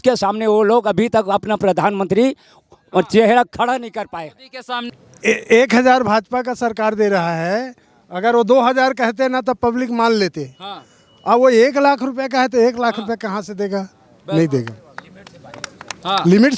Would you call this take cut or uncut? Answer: cut